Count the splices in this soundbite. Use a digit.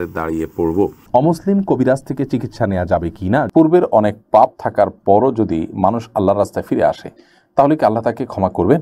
2